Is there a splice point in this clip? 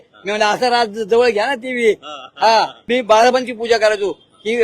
yes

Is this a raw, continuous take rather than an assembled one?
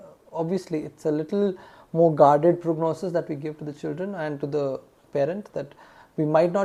yes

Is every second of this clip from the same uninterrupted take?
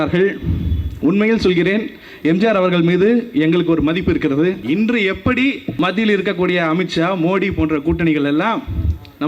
no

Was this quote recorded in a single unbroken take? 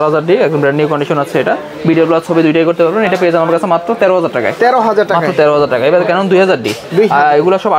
yes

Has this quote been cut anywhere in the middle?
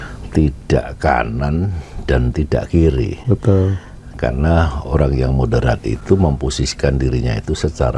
no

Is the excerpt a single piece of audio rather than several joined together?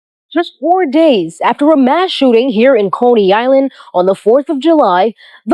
yes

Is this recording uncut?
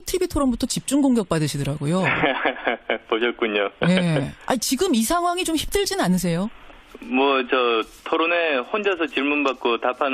no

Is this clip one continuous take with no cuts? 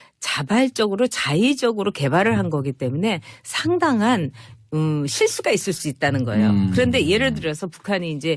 yes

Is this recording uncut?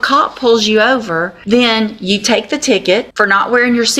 no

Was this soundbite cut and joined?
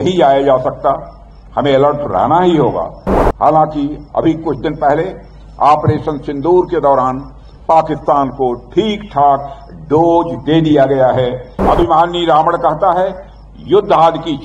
yes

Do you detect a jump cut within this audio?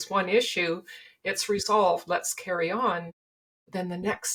no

